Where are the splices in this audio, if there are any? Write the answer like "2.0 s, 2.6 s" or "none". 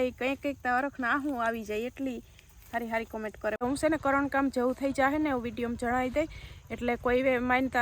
3.6 s